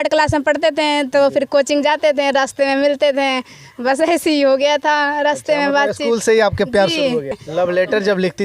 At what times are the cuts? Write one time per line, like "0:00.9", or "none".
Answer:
0:07.3